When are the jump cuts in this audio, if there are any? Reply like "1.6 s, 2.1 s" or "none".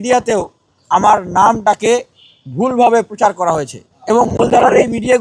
3.9 s